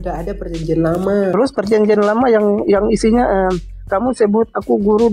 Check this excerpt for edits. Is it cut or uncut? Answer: cut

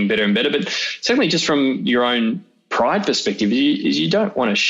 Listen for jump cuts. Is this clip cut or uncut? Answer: uncut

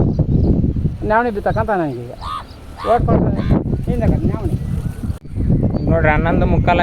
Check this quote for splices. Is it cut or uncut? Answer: cut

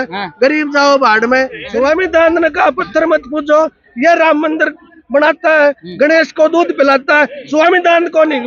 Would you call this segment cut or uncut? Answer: cut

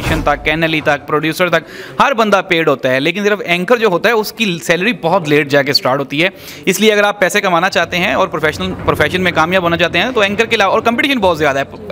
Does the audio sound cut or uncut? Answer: uncut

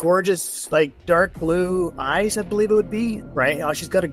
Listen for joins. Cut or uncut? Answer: uncut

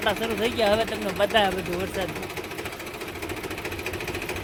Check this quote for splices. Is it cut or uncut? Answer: uncut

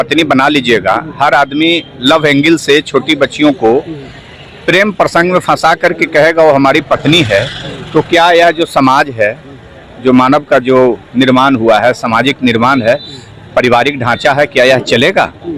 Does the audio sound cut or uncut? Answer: uncut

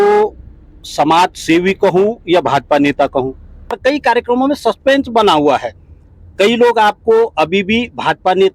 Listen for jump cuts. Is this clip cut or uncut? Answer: cut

